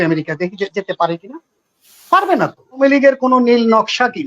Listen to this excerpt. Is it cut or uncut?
cut